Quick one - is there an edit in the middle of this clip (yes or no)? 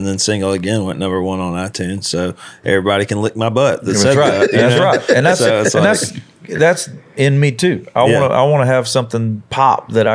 no